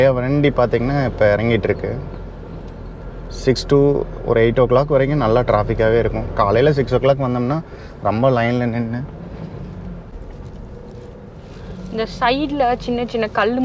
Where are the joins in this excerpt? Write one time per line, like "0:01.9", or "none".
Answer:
0:10.1